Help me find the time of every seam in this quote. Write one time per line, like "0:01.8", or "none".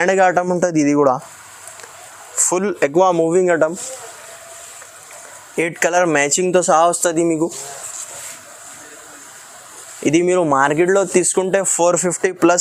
none